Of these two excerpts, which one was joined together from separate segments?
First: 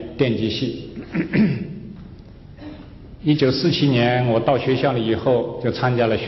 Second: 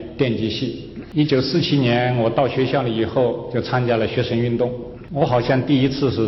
second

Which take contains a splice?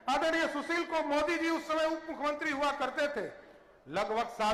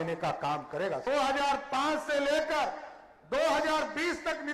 second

